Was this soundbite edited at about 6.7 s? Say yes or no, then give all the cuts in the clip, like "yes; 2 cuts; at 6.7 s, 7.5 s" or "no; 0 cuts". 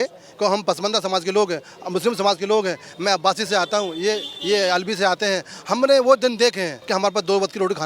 yes; 1 cut; at 6.7 s